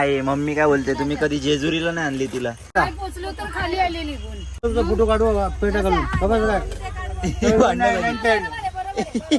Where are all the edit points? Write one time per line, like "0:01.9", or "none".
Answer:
0:02.8
0:04.6